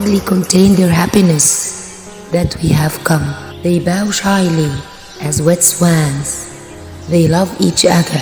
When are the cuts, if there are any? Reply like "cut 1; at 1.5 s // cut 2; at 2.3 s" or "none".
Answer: cut 1; at 3.4 s